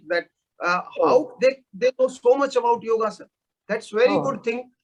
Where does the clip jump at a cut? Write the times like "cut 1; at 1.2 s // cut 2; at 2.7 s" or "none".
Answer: none